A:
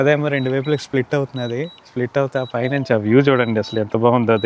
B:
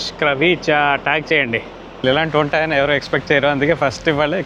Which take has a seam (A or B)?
B